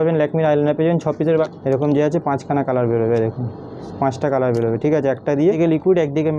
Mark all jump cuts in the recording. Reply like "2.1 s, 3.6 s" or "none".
1.5 s, 5.6 s